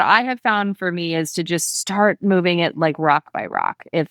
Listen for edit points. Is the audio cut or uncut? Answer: uncut